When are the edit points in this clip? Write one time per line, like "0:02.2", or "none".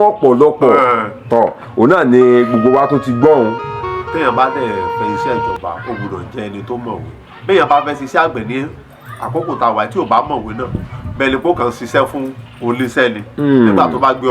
0:03.6